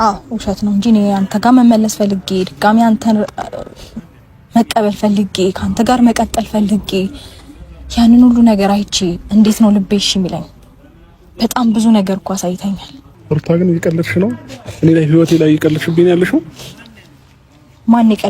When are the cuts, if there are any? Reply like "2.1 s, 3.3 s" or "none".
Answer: 13.1 s